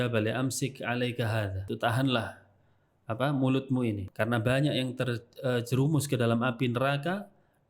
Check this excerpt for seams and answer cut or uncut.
cut